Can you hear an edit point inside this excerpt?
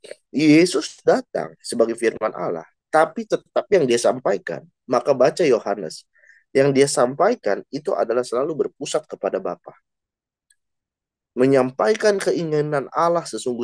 no; 0 cuts

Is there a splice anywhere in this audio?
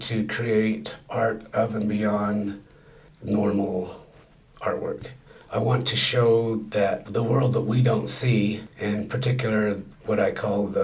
no; 0 cuts

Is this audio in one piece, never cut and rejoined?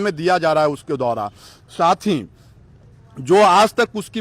yes; 0 cuts

